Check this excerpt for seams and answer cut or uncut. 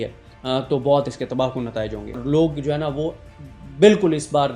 cut